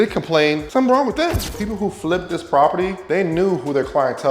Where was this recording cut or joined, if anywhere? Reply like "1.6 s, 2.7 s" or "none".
1.6 s